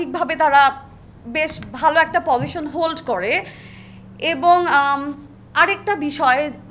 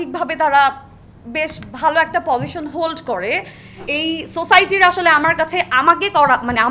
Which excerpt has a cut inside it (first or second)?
second